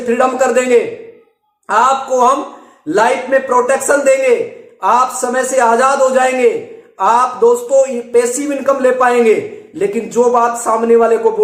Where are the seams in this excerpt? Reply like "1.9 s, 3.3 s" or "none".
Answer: none